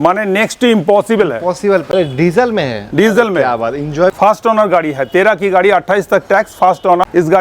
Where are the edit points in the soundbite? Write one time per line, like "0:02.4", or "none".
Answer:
0:01.9
0:04.1